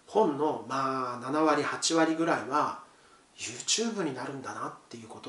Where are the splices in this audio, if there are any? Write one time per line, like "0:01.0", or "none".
none